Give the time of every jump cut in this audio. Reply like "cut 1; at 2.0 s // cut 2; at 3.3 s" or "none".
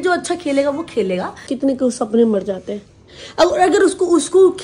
cut 1; at 1.5 s

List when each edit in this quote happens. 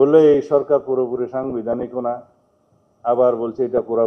none

